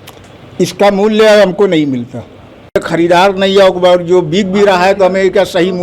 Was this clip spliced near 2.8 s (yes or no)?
yes